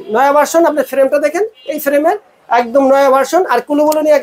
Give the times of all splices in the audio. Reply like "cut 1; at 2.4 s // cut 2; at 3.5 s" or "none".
none